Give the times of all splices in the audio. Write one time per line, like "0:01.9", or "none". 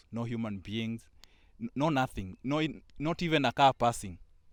none